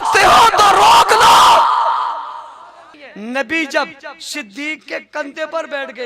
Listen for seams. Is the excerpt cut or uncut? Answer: cut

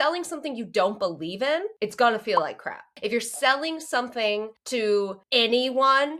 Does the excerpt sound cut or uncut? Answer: cut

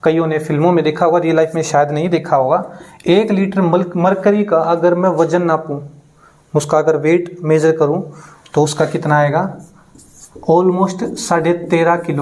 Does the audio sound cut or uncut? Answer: uncut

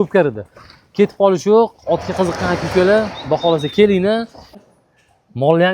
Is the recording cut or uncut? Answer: cut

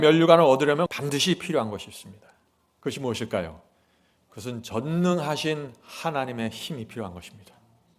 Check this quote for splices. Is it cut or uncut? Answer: cut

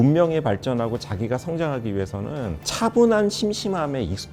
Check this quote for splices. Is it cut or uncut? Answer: uncut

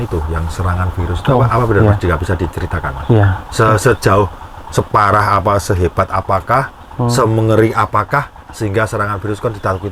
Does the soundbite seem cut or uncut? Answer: uncut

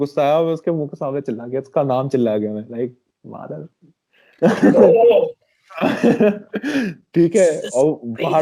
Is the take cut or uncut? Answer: uncut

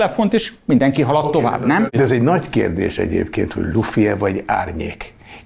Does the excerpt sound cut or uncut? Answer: cut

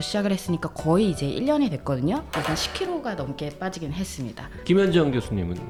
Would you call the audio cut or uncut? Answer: uncut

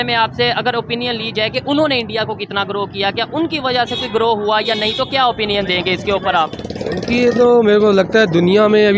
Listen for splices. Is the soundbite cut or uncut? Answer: uncut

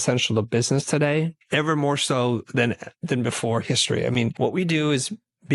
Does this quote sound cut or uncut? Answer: cut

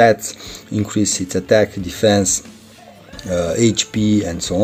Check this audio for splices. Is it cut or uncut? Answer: uncut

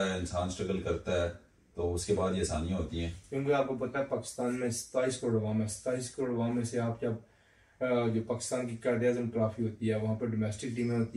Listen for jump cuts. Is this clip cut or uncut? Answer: cut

